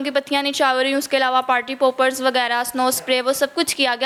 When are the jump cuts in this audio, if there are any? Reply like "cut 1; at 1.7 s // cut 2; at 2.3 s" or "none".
none